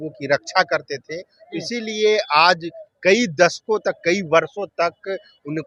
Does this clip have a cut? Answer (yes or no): no